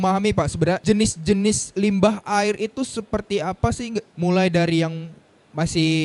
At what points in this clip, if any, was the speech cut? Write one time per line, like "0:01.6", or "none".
0:00.8
0:04.1